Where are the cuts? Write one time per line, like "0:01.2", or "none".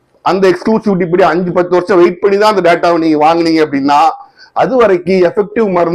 none